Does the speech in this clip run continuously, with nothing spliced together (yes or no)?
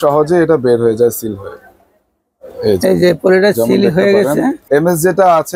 no